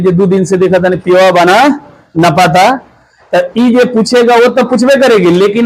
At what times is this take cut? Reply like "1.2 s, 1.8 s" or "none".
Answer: none